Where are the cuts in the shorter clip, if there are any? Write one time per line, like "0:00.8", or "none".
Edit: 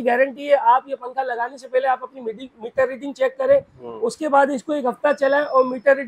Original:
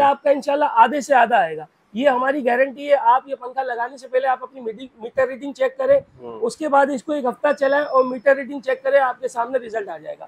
none